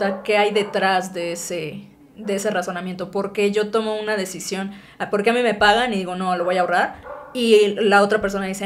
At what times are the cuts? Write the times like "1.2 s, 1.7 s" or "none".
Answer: none